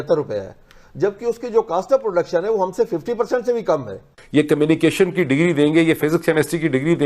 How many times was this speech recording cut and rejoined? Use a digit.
1